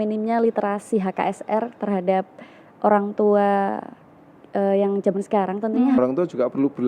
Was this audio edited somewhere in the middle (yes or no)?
yes